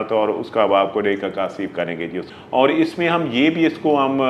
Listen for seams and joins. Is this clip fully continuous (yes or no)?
no